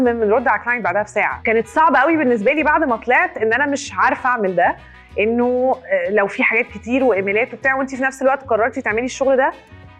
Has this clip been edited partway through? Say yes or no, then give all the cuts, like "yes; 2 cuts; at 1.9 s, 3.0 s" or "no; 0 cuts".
no; 0 cuts